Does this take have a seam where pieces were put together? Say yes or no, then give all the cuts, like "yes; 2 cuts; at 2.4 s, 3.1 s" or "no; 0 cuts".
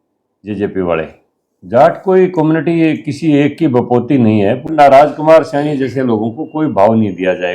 yes; 1 cut; at 4.6 s